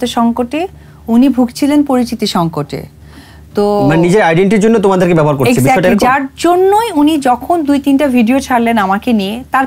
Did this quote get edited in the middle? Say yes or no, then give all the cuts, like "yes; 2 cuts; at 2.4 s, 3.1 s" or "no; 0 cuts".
no; 0 cuts